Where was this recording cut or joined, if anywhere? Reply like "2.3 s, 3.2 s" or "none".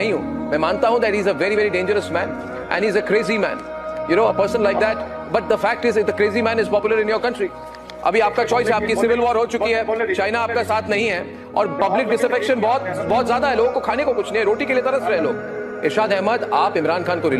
none